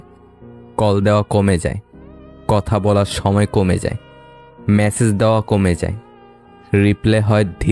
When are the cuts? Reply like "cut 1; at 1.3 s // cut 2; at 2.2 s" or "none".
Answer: none